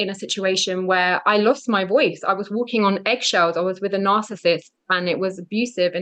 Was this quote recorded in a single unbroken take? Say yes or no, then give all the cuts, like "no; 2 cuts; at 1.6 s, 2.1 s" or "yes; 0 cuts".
yes; 0 cuts